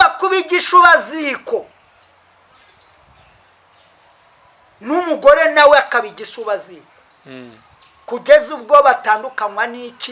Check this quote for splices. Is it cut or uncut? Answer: uncut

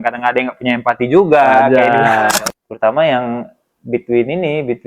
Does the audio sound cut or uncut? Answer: cut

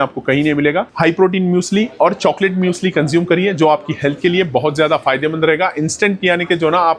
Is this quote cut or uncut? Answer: cut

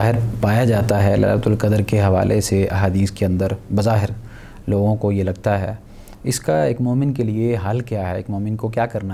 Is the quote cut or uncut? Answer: uncut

